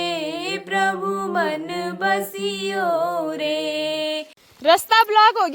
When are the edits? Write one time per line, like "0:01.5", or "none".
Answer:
0:04.5